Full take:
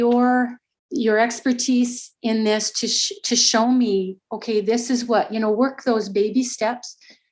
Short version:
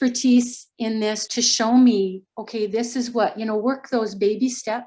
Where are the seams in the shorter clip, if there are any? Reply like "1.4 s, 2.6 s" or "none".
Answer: 1.2 s

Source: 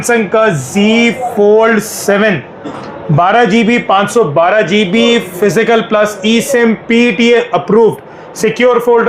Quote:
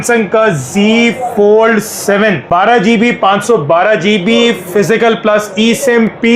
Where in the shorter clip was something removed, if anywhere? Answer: 2.4 s

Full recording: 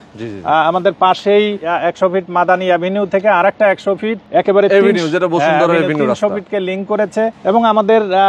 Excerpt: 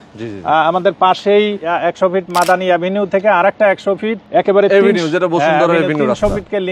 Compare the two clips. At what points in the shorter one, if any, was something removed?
none

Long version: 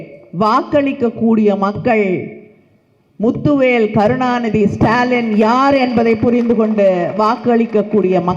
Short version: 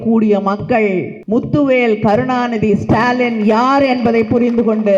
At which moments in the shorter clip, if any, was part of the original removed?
1.2 s

